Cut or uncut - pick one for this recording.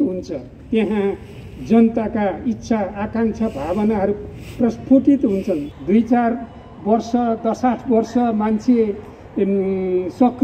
cut